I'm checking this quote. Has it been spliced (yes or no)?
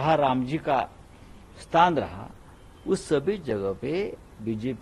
no